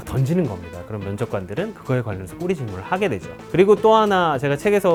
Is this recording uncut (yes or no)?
yes